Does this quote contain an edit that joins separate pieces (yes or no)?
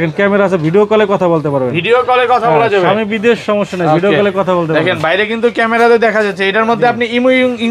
no